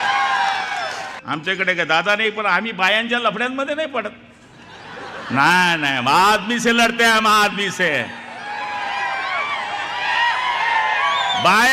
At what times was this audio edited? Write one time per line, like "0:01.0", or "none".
0:01.1